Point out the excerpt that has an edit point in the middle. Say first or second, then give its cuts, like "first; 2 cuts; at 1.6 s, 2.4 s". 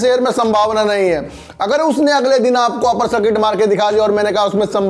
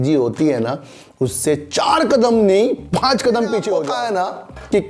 second; 1 cut; at 4.0 s